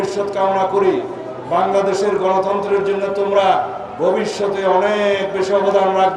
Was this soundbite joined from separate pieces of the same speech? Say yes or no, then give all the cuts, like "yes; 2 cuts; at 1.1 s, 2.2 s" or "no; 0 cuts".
no; 0 cuts